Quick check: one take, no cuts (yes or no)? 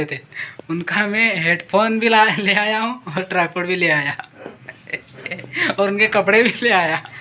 yes